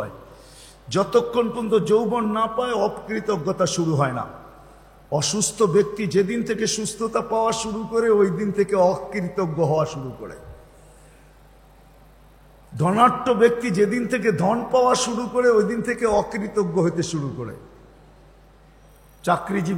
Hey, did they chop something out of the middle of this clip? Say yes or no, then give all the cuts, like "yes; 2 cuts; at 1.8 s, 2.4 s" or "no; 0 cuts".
no; 0 cuts